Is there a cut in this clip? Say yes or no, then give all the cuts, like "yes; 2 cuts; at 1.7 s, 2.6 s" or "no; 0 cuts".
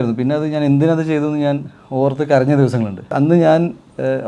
yes; 1 cut; at 3.1 s